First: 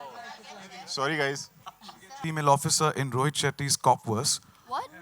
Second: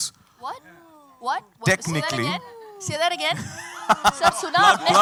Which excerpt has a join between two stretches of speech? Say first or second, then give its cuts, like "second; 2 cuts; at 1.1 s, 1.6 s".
first; 1 cut; at 2.1 s